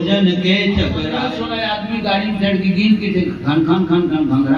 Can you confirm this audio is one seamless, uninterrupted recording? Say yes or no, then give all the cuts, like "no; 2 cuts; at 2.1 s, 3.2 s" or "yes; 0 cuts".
no; 1 cut; at 1.3 s